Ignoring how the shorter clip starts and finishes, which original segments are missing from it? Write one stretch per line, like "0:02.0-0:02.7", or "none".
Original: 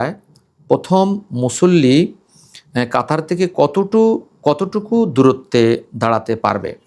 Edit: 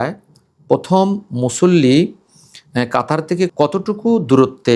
0:03.5-0:04.4